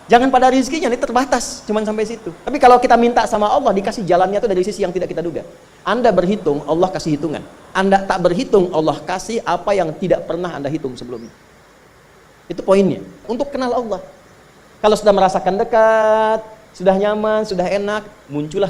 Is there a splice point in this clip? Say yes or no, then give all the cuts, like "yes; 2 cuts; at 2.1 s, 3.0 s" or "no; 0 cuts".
yes; 1 cut; at 13.3 s